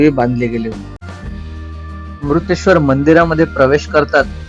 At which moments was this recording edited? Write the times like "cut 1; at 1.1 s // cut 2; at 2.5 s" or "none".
cut 1; at 1.0 s